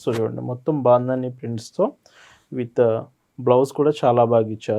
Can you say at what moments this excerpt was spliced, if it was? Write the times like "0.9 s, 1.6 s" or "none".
none